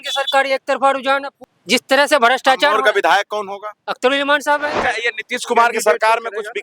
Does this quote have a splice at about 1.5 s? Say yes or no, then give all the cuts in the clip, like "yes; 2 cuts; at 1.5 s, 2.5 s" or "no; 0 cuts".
yes; 2 cuts; at 1.5 s, 4.8 s